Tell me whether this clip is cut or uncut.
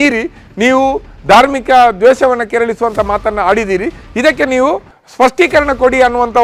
uncut